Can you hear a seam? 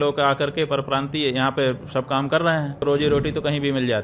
yes; 1 cut; at 2.8 s

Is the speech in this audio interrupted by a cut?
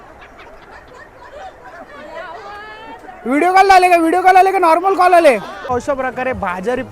yes; 1 cut; at 5.7 s

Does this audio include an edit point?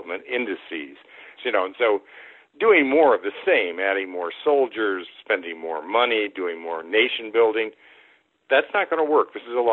yes; 1 cut; at 1.3 s

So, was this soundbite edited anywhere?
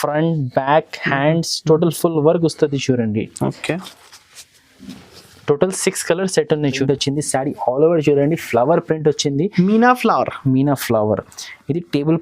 yes; 1 cut; at 6.8 s

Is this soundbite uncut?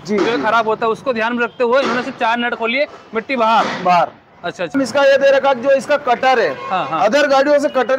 no; 1 cut; at 4.8 s

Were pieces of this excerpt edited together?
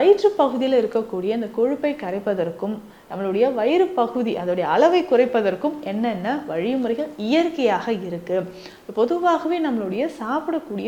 no; 0 cuts

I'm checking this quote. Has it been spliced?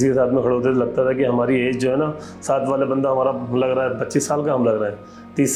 no; 0 cuts

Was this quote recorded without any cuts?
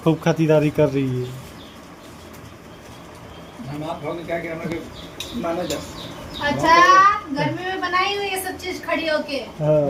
yes; 0 cuts

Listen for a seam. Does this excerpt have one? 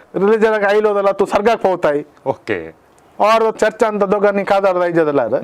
yes; 1 cut; at 3.5 s

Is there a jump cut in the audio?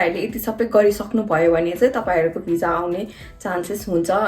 no; 0 cuts

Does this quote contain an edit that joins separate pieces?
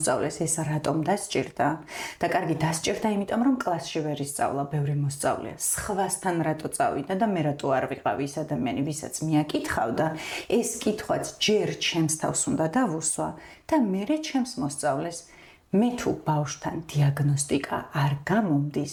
no; 0 cuts

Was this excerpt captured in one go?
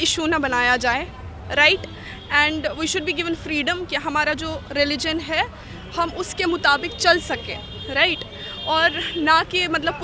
yes; 0 cuts

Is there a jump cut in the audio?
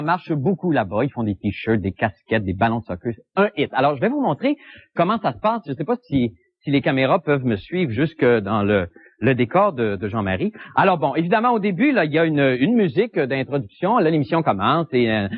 no; 0 cuts

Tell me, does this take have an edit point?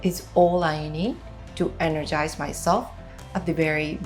no; 0 cuts

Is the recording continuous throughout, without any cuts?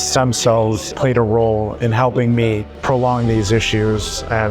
no; 2 cuts; at 0.9 s, 2.7 s

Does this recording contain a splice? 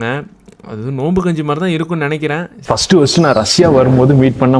yes; 1 cut; at 2.5 s

